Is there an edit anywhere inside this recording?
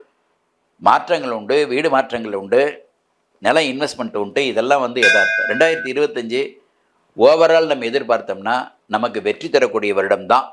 no; 0 cuts

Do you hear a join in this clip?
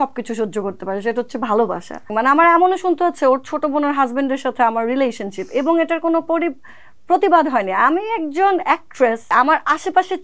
yes; 2 cuts; at 2.1 s, 9.3 s

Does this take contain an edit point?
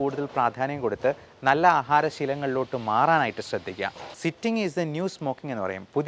yes; 1 cut; at 4.1 s

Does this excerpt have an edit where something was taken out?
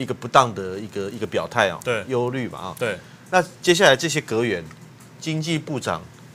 no; 0 cuts

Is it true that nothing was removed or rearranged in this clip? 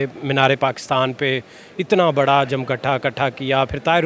yes; 0 cuts

